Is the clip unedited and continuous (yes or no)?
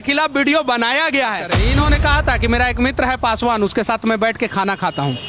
no